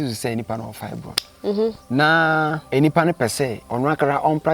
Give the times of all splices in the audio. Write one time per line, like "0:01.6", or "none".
0:01.8
0:02.6
0:03.6